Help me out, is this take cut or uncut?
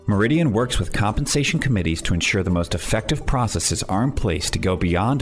uncut